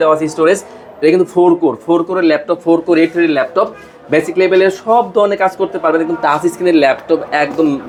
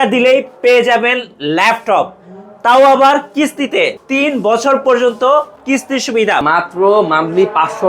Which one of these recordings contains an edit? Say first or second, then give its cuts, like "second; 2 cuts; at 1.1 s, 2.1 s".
second; 2 cuts; at 4.0 s, 6.4 s